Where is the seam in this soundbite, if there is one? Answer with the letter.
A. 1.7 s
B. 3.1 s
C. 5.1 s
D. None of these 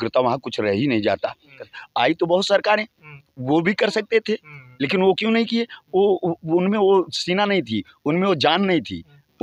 A